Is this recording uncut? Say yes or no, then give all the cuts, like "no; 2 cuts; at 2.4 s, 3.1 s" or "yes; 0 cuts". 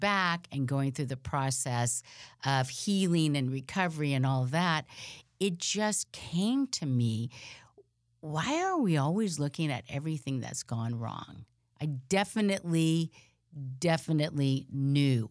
yes; 0 cuts